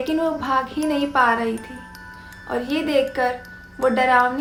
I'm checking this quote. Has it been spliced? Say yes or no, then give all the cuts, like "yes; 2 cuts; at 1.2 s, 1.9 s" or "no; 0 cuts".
no; 0 cuts